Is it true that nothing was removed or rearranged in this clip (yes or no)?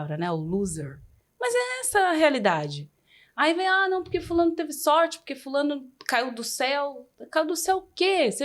yes